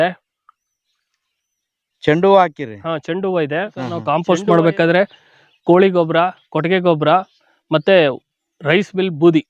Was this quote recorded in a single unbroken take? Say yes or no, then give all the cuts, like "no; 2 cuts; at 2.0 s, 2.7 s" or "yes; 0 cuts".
no; 1 cut; at 3.9 s